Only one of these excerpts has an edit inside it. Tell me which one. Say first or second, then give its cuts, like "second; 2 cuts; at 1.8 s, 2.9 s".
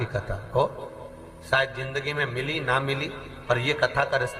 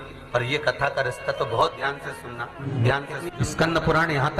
second; 2 cuts; at 2.6 s, 3.3 s